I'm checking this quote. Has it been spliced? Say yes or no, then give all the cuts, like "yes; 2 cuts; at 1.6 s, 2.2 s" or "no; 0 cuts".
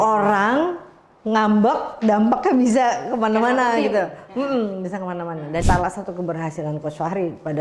yes; 1 cut; at 5.6 s